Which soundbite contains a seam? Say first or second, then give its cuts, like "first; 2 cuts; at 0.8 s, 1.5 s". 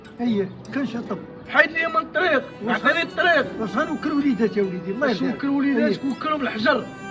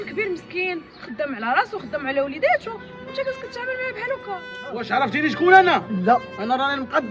second; 1 cut; at 4.8 s